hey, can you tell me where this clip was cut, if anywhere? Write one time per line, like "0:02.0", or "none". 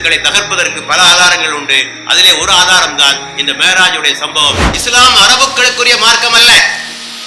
0:04.7